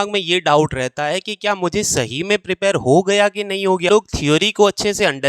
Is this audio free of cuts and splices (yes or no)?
no